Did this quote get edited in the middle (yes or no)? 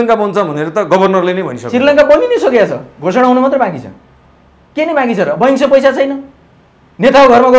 no